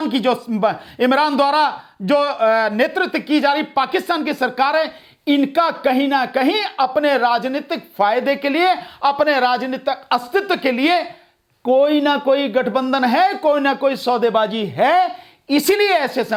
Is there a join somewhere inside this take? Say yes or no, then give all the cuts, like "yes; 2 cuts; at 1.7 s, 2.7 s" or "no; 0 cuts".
no; 0 cuts